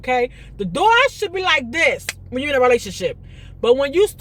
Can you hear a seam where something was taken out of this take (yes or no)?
no